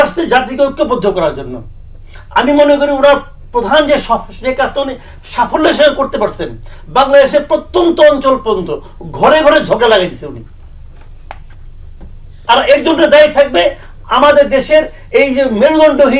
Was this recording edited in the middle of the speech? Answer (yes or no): no